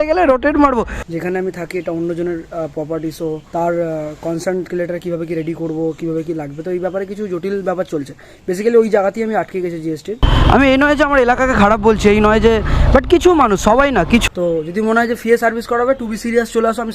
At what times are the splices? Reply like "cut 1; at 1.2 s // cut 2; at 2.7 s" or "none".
cut 1; at 1.0 s // cut 2; at 10.2 s // cut 3; at 14.2 s